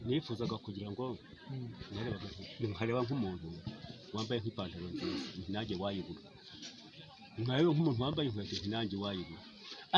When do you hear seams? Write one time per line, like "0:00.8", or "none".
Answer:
none